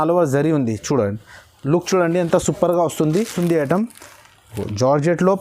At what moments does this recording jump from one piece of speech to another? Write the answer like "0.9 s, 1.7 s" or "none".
3.3 s